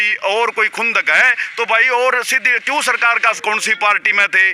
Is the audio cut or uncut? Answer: cut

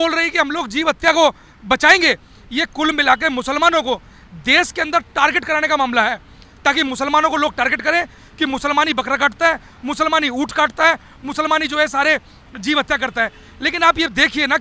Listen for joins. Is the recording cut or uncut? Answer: uncut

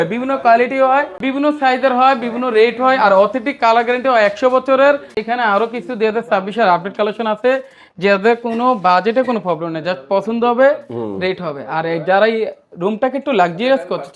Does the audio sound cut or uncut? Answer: cut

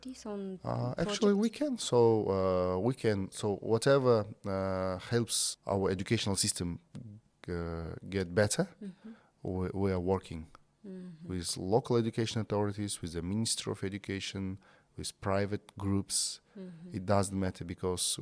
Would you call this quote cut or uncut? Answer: uncut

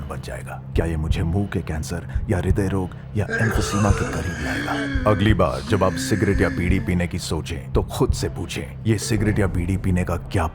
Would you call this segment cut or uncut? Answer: uncut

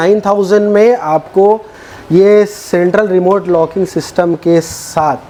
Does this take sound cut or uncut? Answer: uncut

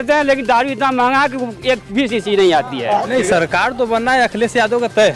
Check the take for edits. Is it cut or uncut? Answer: cut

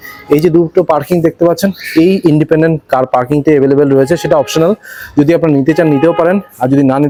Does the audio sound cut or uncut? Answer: uncut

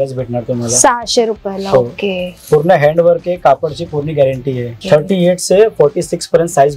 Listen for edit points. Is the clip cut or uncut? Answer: uncut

